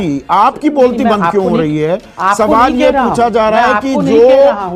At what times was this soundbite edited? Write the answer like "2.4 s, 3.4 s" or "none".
none